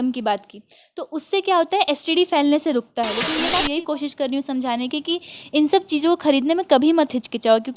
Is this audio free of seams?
no; 1 cut; at 3.6 s

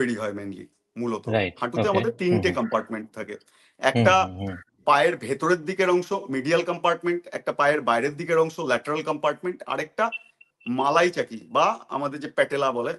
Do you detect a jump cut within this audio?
no; 0 cuts

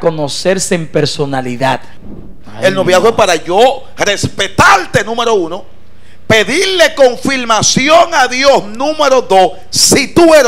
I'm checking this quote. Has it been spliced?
yes; 1 cut; at 1.9 s

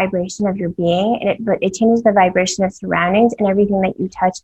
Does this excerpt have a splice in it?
no; 0 cuts

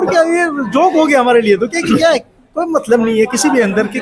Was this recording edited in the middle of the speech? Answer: no; 0 cuts

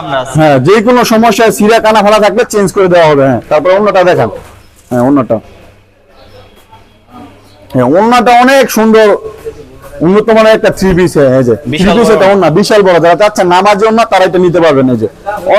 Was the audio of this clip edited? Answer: no; 0 cuts

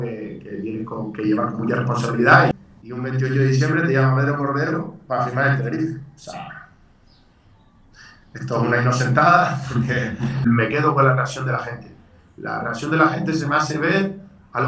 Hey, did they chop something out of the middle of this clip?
yes; 2 cuts; at 2.5 s, 10.4 s

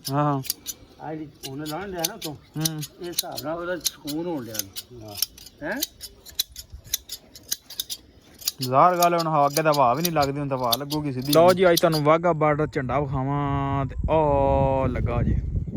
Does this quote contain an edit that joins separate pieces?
yes; 1 cut; at 11.2 s

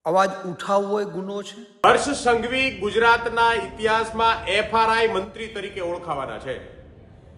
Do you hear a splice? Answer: yes; 1 cut; at 1.8 s

